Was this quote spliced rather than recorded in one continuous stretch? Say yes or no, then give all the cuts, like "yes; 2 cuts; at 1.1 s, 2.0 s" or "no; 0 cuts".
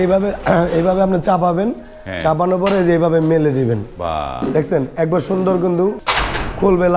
yes; 1 cut; at 6.0 s